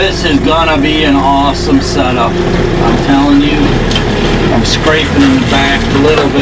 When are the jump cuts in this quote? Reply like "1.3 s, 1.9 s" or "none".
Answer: none